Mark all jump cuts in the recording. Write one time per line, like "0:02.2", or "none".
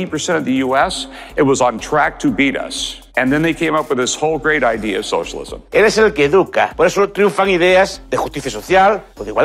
0:05.6
0:06.7